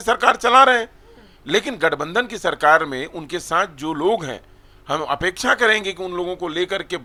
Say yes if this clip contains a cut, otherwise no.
no